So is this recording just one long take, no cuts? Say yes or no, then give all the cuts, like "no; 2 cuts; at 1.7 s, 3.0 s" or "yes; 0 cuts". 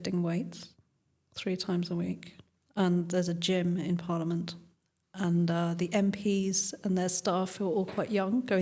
yes; 0 cuts